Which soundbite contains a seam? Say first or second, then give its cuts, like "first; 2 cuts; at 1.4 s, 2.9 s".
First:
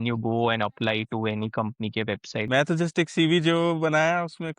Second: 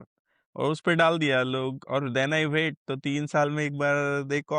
first; 1 cut; at 2.3 s